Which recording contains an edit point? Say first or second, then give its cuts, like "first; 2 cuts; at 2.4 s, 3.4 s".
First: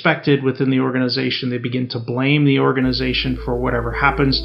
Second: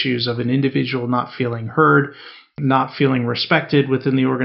second; 1 cut; at 2.5 s